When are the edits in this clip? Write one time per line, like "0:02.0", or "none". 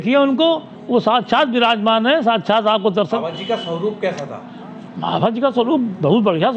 0:03.2